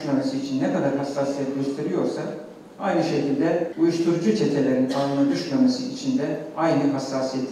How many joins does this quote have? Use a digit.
1